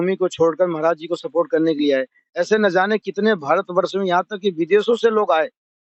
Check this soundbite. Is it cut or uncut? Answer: uncut